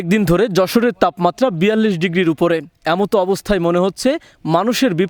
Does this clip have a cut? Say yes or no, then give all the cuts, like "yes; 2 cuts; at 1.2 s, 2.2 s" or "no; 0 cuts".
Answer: no; 0 cuts